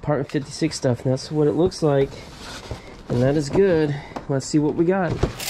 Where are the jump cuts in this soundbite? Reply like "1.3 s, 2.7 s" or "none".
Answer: none